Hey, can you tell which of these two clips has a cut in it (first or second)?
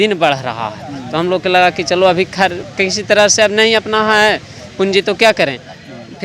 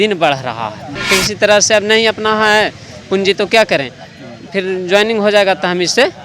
second